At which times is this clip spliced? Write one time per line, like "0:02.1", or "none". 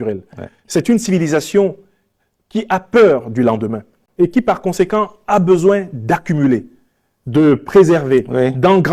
none